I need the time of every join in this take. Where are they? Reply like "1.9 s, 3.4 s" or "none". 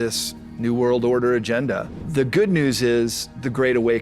1.9 s